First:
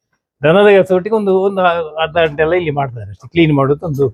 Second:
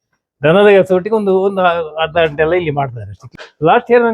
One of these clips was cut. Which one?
second; 1 cut; at 3.2 s

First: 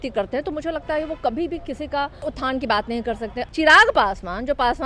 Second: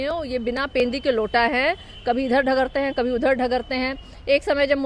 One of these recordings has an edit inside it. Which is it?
first; 2 cuts; at 2.3 s, 3.4 s

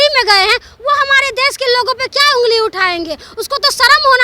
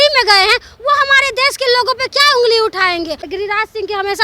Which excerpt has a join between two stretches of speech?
second; 1 cut; at 3.3 s

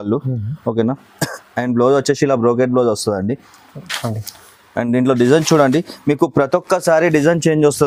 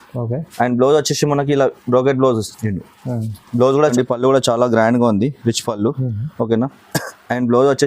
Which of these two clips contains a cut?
second; 1 cut; at 3.9 s

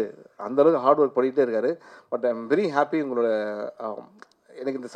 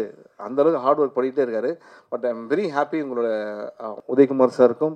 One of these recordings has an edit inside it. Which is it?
second; 1 cut; at 4.0 s

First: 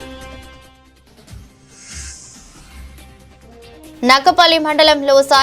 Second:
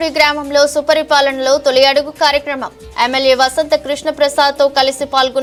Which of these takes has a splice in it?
first; 1 cut; at 3.9 s

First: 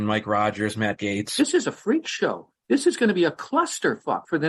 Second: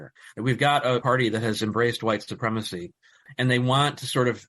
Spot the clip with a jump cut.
first; 1 cut; at 1.3 s

